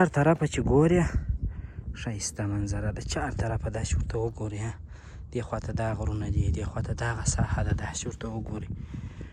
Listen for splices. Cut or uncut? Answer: uncut